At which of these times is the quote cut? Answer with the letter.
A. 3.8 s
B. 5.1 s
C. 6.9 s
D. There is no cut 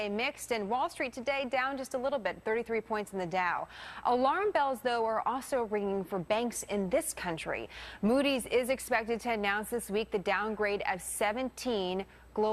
C